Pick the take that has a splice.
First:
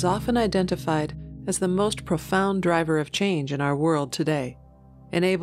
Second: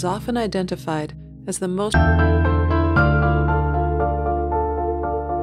first; 1 cut; at 1.9 s

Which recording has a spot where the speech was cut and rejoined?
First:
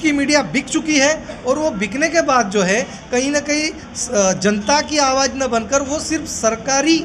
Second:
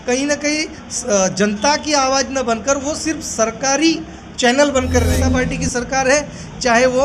second; 1 cut; at 5.1 s

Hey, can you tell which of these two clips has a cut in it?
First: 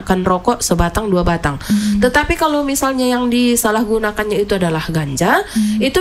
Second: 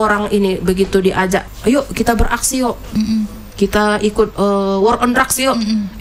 second; 1 cut; at 1.5 s

